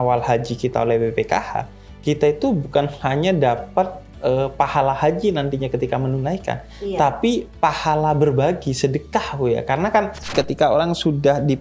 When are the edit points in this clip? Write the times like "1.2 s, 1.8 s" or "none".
10.3 s